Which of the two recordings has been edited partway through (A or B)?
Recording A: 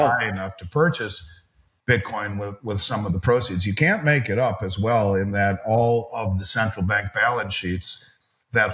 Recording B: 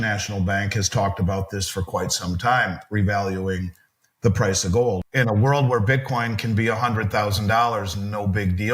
B